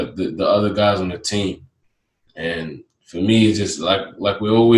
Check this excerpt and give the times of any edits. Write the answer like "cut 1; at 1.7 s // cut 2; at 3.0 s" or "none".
none